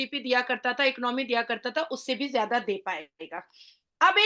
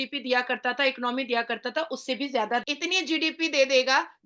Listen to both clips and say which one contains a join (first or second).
second